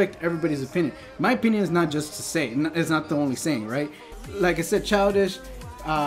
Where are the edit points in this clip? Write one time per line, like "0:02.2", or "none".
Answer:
0:04.0